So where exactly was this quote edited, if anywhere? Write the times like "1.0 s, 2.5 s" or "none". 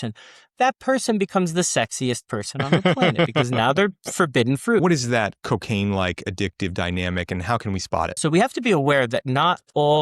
4.8 s, 8.2 s